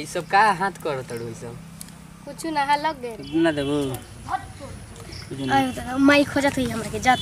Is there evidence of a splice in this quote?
yes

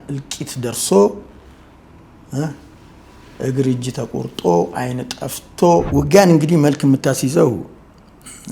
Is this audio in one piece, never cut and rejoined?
no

